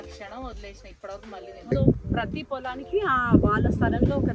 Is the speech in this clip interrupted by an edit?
yes; 1 cut; at 1.7 s

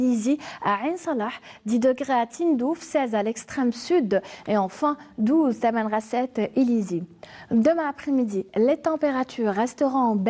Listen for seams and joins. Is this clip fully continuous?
no; 1 cut; at 5.0 s

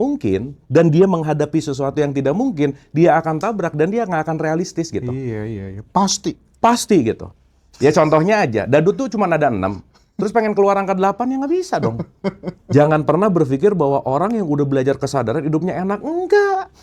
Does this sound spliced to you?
yes; 1 cut; at 12.5 s

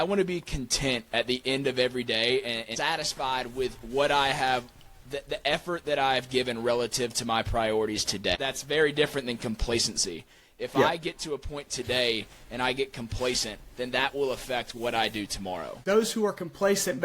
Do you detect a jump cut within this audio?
yes; 3 cuts; at 2.7 s, 8.4 s, 15.8 s

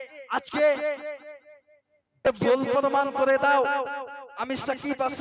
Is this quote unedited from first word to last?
yes; 0 cuts

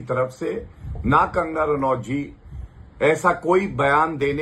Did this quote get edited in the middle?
no; 0 cuts

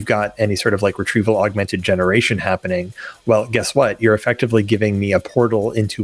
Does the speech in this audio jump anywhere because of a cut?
no; 0 cuts

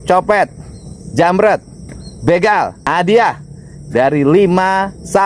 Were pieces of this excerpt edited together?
yes; 1 cut; at 2.8 s

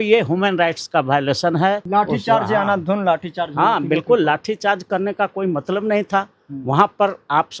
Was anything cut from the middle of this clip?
yes; 1 cut; at 1.8 s

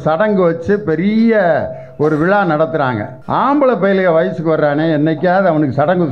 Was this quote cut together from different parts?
yes; 1 cut; at 3.1 s

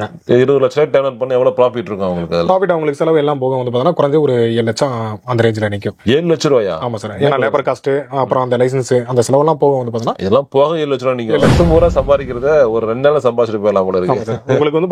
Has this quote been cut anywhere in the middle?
yes; 1 cut; at 11.5 s

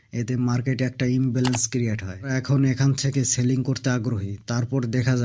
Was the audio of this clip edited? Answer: yes; 1 cut; at 2.3 s

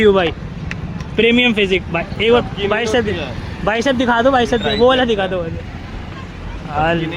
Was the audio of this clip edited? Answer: no; 0 cuts

